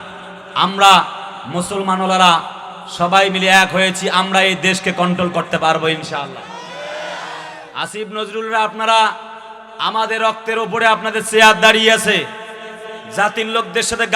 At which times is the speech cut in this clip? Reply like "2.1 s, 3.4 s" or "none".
none

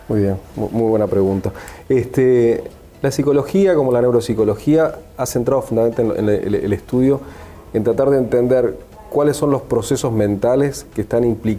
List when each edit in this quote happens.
7.4 s

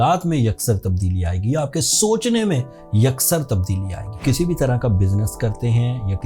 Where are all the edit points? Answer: 4.2 s

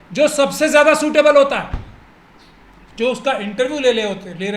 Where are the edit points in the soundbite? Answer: none

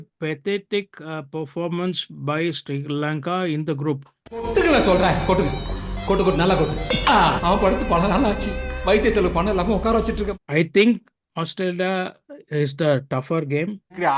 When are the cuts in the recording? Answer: 10.4 s

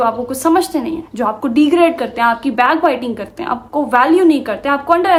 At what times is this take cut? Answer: none

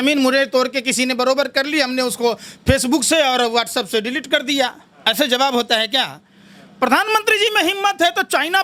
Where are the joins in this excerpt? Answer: none

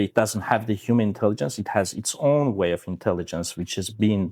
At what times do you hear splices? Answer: none

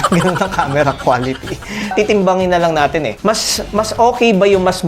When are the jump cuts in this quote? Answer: 1.9 s

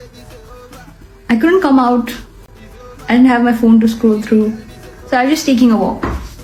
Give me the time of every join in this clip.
none

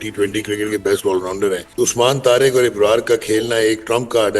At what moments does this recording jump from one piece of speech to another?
1.6 s

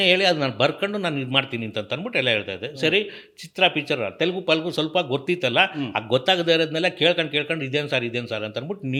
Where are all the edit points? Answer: none

